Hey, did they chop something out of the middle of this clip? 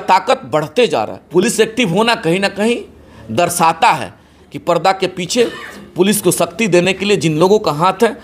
yes; 1 cut; at 1.3 s

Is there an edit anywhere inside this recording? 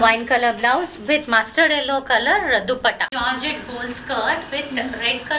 yes; 1 cut; at 3.1 s

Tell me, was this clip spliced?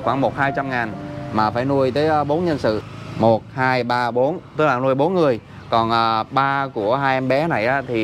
yes; 1 cut; at 2.9 s

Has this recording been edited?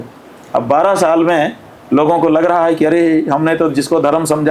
no; 0 cuts

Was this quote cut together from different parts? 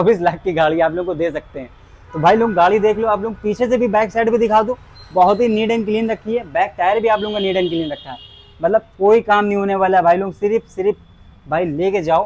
no; 0 cuts

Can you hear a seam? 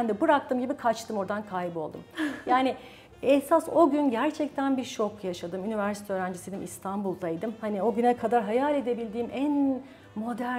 no; 0 cuts

